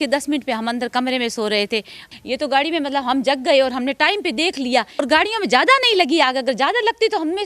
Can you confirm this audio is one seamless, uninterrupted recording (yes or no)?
no